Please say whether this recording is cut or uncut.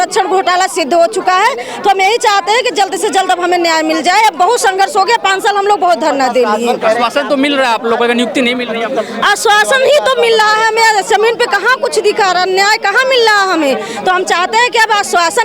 uncut